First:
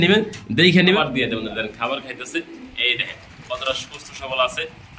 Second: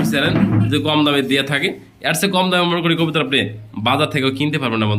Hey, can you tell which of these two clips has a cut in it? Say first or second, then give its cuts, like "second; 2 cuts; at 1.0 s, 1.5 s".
first; 1 cut; at 1.0 s